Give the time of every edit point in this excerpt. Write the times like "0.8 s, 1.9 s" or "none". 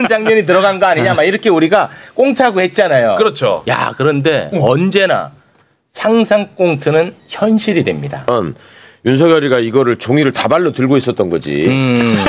8.3 s